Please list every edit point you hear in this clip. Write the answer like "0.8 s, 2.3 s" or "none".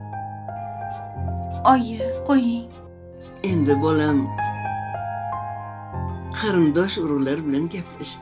1.6 s